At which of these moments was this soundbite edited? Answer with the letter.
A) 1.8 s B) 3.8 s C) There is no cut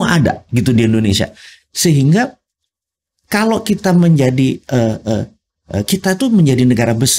C